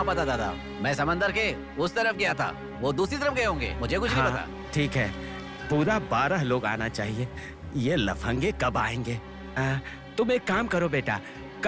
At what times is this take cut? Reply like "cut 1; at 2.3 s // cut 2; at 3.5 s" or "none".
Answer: none